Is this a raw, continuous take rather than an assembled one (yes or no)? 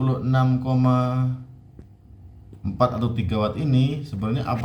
yes